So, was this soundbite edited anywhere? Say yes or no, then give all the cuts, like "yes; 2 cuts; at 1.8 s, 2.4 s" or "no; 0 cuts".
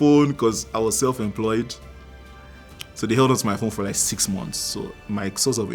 no; 0 cuts